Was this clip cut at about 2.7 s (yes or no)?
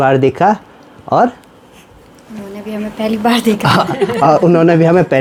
no